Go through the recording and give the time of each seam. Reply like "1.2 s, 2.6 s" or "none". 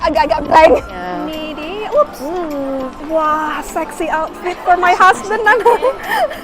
1.0 s